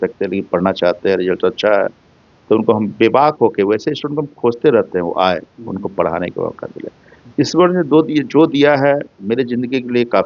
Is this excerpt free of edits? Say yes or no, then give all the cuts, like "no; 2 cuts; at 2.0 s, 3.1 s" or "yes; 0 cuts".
yes; 0 cuts